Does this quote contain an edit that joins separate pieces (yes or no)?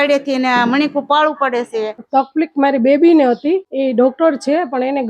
yes